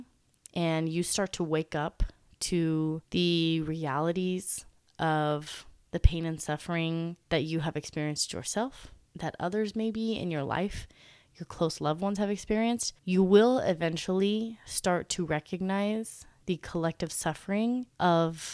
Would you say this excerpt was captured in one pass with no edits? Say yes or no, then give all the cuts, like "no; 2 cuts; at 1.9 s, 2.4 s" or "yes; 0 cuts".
no; 1 cut; at 7.2 s